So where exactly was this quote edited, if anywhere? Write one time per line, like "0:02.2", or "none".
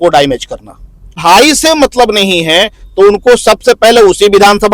0:01.2